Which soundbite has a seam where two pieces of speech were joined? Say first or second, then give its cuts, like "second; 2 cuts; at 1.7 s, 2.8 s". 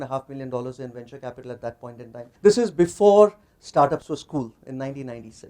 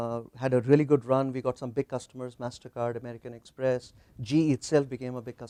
first; 1 cut; at 2.3 s